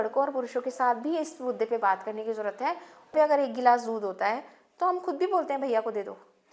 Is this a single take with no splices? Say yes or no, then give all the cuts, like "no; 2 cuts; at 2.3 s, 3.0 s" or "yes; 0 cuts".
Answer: no; 1 cut; at 3.1 s